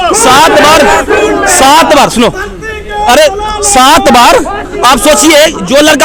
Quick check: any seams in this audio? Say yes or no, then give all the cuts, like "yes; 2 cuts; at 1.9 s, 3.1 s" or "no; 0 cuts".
no; 0 cuts